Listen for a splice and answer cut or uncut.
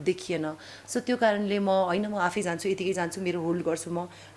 uncut